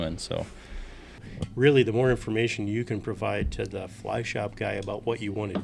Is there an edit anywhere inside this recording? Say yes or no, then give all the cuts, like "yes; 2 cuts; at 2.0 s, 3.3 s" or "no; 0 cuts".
yes; 1 cut; at 1.3 s